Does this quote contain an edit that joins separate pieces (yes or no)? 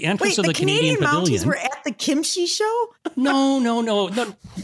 yes